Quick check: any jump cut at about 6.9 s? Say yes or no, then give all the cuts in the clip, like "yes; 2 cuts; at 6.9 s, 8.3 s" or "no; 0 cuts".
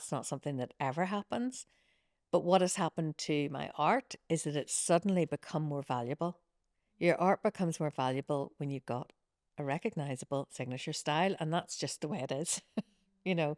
no; 0 cuts